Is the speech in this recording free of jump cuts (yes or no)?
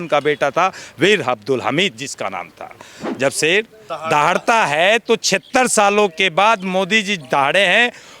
no